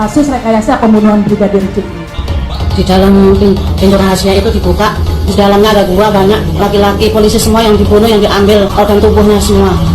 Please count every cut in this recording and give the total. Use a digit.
1